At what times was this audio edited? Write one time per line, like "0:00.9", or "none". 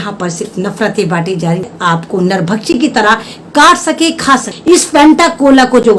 0:01.7
0:04.5